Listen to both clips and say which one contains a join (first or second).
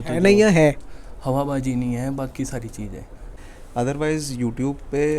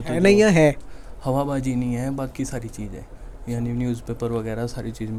first